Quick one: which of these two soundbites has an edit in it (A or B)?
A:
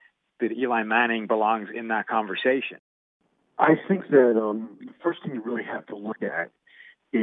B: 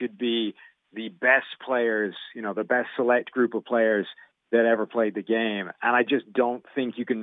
A